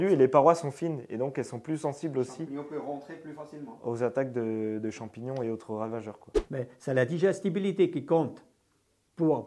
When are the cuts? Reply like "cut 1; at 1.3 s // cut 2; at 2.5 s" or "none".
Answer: cut 1; at 6.4 s